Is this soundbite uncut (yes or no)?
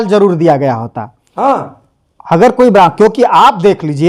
yes